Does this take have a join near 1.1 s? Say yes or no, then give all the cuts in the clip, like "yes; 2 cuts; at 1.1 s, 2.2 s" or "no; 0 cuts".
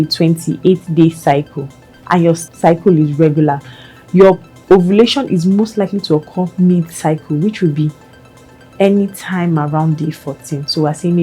no; 1 cut; at 2.5 s